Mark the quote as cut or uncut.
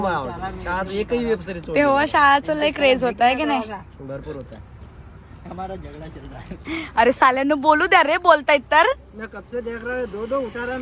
uncut